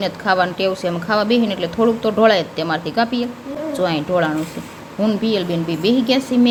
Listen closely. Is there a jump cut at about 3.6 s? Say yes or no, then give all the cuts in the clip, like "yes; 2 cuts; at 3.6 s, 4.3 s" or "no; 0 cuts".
no; 0 cuts